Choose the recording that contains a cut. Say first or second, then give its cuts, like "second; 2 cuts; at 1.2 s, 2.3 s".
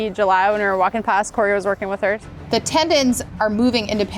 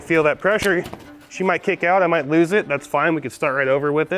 first; 2 cuts; at 2.2 s, 3.3 s